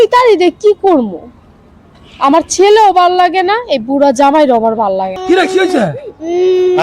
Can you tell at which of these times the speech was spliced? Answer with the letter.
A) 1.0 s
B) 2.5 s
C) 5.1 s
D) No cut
C